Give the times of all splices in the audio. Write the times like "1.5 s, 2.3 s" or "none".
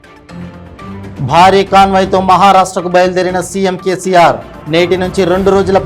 0.9 s